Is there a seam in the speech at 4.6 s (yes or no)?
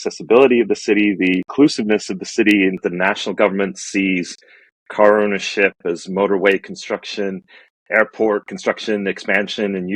no